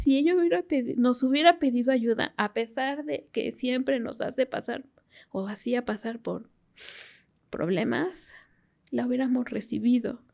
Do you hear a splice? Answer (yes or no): no